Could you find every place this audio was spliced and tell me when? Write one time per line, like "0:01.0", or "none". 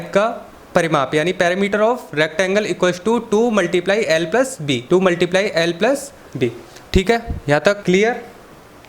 0:04.8
0:07.8